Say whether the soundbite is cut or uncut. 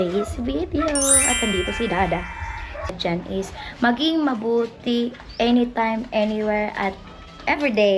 cut